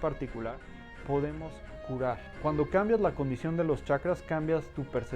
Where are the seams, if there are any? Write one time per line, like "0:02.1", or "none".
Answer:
0:02.3